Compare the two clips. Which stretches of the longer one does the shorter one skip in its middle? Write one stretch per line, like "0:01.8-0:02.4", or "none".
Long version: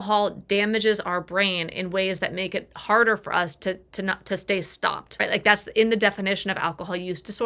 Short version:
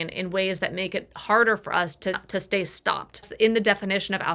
0:03.8-0:04.2
0:05.2-0:05.6